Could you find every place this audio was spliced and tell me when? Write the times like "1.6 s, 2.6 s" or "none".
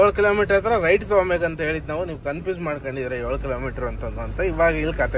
none

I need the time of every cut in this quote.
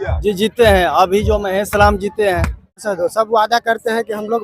2.9 s

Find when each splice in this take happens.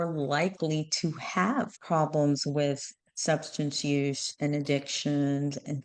1.8 s

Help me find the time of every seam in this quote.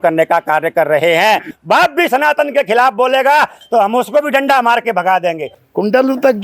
1.5 s, 3.6 s, 5.5 s

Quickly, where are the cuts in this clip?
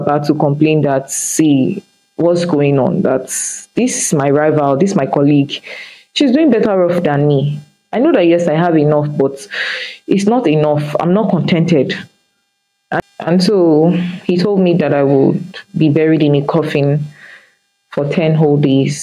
13.0 s

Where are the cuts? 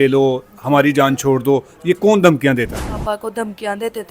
3.0 s

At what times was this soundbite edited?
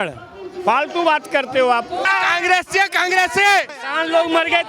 2.0 s, 3.8 s

